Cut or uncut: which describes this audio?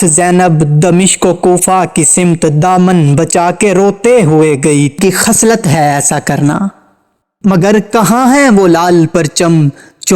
cut